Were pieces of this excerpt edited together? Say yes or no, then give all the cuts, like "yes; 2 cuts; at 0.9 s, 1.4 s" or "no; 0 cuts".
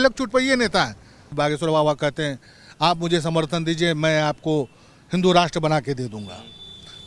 yes; 1 cut; at 1.3 s